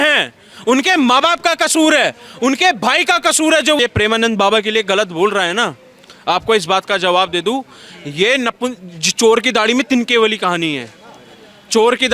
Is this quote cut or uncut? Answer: cut